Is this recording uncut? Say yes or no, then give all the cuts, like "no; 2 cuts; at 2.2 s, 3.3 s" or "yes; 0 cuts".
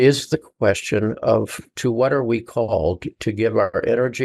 yes; 0 cuts